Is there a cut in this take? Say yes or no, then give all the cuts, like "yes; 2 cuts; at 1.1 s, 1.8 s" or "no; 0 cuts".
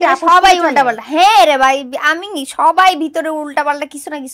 no; 0 cuts